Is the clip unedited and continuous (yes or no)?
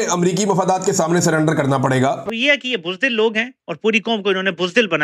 yes